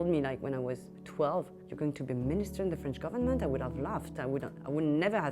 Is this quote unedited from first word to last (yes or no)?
no